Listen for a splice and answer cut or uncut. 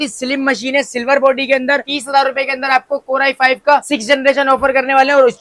cut